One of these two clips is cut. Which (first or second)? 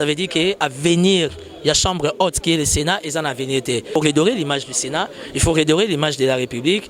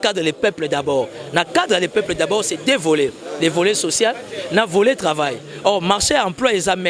first